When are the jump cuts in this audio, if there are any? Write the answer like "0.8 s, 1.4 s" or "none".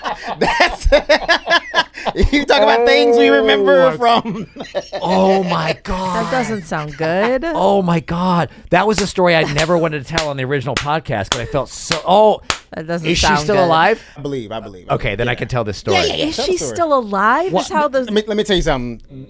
14.3 s